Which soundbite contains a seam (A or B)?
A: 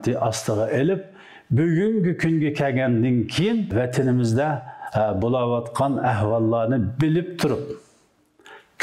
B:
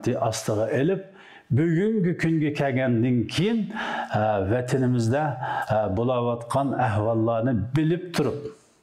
A